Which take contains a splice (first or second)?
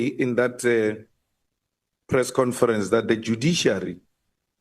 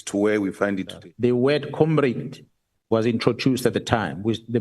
second